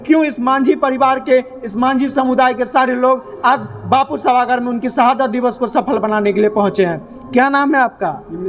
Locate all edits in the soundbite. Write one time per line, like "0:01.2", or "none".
none